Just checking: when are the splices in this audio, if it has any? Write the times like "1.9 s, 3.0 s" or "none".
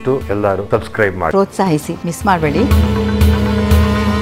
1.3 s, 2.7 s